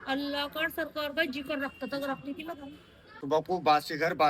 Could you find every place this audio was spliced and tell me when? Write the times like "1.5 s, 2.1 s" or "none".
3.1 s